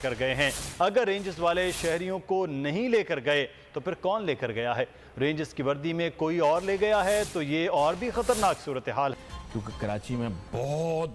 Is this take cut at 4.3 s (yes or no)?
no